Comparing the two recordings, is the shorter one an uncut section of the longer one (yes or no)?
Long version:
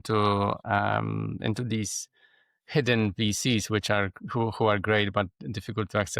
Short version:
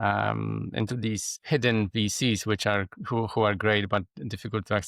no